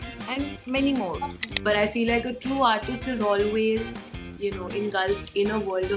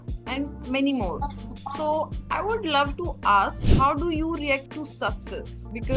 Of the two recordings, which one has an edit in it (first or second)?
first